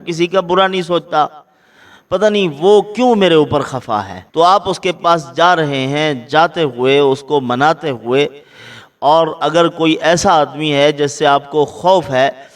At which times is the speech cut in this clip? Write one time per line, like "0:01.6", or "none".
0:04.2